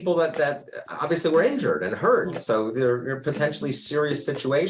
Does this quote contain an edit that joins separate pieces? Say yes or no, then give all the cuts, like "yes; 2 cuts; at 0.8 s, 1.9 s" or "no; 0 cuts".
yes; 1 cut; at 2.4 s